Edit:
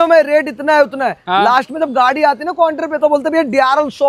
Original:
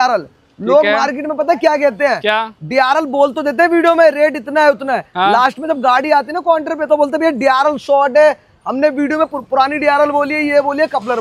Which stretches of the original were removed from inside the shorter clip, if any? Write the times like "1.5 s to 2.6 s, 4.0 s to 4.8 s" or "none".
none